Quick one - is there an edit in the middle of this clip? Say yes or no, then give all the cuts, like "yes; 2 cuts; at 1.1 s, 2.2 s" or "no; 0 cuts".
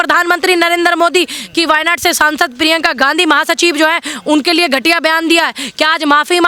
no; 0 cuts